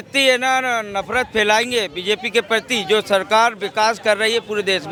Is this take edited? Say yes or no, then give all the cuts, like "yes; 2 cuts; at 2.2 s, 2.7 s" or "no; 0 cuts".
no; 0 cuts